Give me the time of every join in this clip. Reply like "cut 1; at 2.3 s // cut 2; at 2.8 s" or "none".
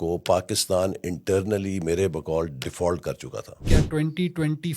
cut 1; at 3.6 s